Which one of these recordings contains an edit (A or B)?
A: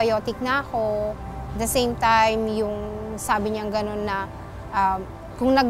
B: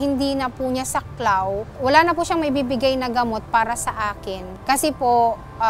B